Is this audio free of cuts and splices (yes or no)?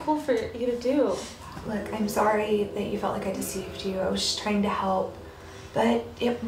no